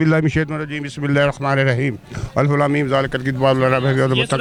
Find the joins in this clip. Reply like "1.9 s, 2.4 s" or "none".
none